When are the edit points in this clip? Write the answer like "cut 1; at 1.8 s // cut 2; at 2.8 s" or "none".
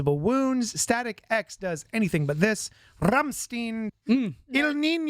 cut 1; at 3.9 s